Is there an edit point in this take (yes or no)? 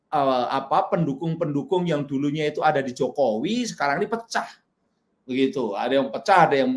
no